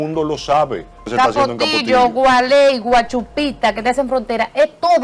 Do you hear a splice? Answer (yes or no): yes